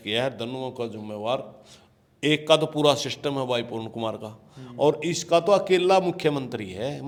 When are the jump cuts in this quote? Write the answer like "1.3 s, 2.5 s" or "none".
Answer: none